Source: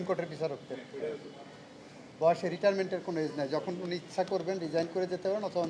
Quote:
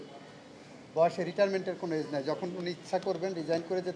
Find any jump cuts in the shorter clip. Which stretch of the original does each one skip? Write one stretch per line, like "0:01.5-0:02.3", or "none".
none

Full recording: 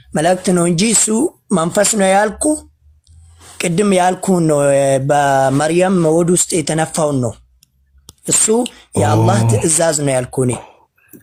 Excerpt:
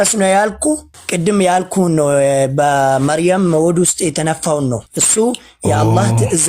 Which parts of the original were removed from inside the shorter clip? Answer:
0:02.8-0:03.5
0:07.5-0:08.3

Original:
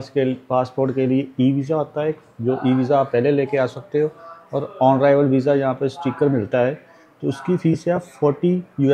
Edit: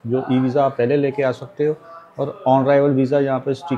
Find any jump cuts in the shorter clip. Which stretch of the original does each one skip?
none

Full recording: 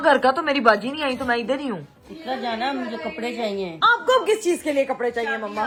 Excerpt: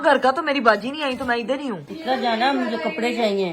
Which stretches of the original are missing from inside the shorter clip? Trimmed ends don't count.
0:01.9-0:02.1

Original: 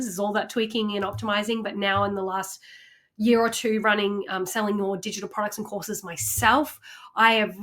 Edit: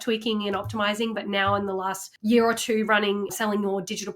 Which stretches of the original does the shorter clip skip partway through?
0:02.5-0:03.0
0:04.3-0:04.5

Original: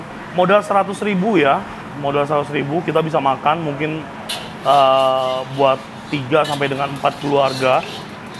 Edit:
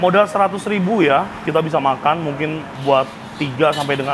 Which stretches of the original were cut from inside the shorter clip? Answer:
0:01.8-0:02.9
0:04.1-0:05.5

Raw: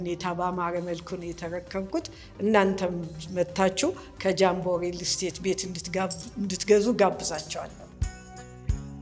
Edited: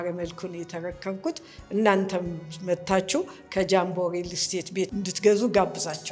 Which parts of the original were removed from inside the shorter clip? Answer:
0:05.6-0:06.4

